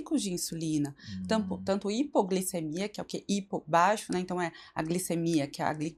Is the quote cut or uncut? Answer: uncut